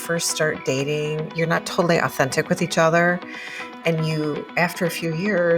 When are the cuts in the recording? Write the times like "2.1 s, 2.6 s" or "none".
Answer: 1.3 s